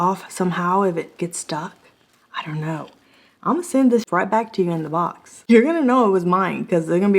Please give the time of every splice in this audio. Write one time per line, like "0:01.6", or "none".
0:04.1